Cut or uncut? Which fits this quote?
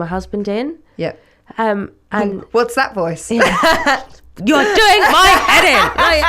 uncut